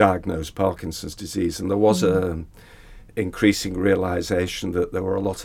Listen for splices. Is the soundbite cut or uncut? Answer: uncut